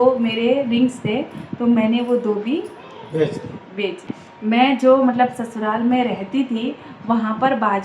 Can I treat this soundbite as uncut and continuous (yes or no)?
no